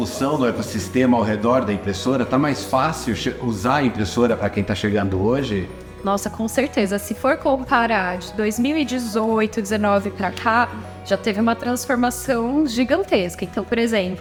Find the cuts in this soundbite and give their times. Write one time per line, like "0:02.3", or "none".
none